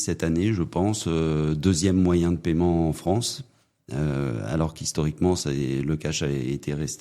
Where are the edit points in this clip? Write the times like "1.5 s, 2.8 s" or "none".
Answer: none